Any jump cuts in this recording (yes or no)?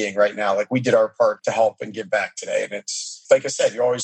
yes